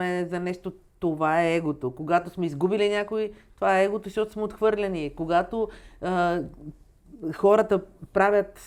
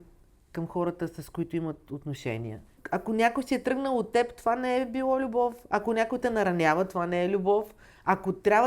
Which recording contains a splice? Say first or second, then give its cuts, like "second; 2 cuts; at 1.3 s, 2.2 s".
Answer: second; 1 cut; at 2.7 s